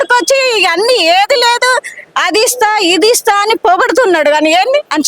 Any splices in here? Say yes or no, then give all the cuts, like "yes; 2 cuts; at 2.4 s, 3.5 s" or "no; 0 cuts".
no; 0 cuts